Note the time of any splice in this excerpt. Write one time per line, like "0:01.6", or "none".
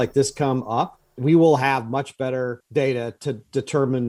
0:01.2
0:02.6